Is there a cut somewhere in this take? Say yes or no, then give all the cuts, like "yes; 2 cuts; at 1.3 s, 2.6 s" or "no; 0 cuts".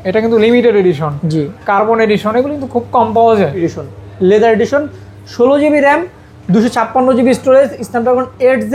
yes; 1 cut; at 3.6 s